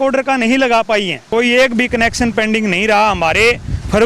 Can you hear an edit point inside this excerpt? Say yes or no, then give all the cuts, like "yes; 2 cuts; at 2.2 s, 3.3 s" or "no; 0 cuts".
yes; 1 cut; at 1.2 s